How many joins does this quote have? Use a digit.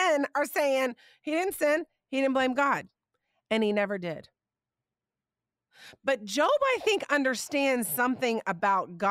0